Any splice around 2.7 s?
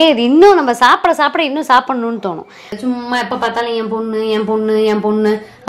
yes; 1 cut; at 2.7 s

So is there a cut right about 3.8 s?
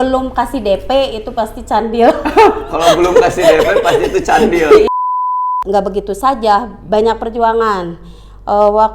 no; 1 cut; at 5.2 s

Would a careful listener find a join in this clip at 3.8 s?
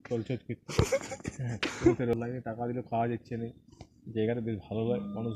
no; 1 cut; at 2.1 s

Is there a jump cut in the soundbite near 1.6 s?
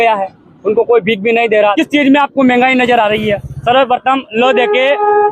yes; 1 cut; at 1.6 s

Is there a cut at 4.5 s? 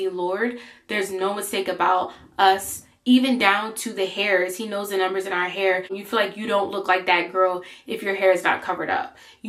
no; 1 cut; at 6.0 s

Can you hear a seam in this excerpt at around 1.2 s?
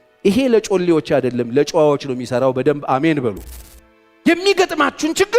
no; 1 cut; at 3.6 s

